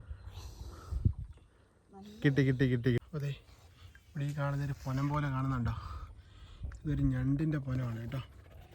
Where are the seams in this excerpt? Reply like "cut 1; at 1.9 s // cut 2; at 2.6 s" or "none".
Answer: cut 1; at 3.0 s